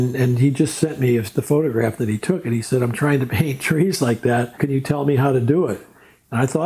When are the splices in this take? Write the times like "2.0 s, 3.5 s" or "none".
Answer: 4.5 s